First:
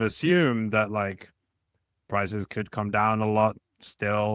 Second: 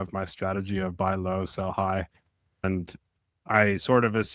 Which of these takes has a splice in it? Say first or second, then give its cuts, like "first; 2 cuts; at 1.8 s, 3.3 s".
second; 1 cut; at 2.6 s